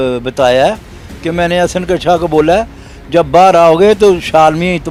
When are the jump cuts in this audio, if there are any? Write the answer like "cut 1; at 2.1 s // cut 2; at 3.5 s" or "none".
none